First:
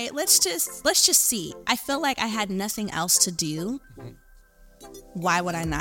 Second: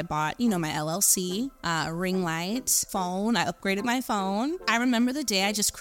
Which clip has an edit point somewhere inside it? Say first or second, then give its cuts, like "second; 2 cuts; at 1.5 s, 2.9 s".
second; 3 cuts; at 1.6 s, 2.8 s, 4.6 s